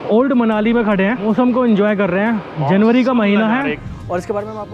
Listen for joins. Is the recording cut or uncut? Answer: cut